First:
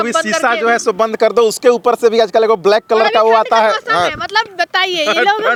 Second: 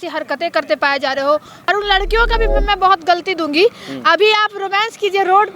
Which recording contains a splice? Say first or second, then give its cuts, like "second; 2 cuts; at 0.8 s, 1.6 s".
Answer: second; 1 cut; at 1.5 s